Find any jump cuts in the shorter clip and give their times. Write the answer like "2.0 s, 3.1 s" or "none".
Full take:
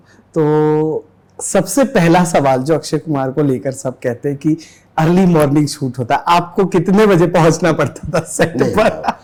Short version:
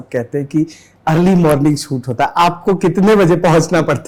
none